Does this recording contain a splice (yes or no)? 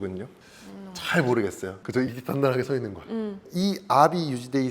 yes